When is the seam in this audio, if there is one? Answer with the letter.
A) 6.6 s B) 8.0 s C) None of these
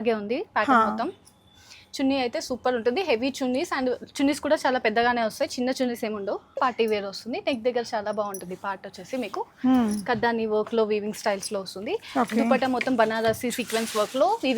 A